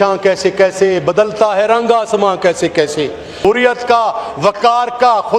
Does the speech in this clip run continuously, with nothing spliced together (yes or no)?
no